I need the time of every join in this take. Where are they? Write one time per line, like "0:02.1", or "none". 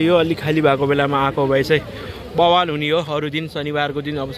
none